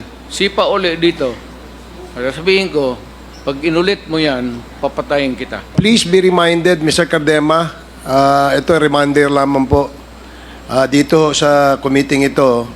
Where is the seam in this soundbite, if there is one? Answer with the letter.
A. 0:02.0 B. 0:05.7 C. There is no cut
B